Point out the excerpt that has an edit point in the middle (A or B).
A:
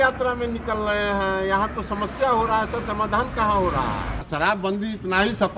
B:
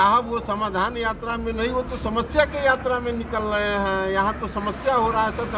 A